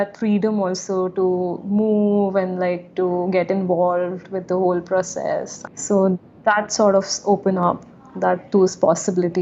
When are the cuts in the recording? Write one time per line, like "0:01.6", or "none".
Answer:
none